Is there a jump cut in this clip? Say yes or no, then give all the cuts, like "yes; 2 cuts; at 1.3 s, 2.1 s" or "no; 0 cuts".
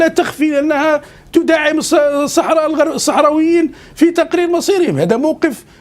no; 0 cuts